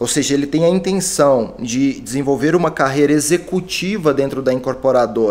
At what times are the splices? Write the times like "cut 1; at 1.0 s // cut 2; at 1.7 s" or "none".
none